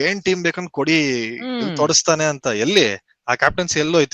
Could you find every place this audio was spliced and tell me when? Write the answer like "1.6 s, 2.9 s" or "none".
none